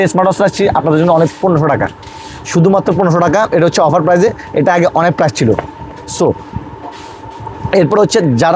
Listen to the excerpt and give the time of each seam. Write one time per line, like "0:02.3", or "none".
none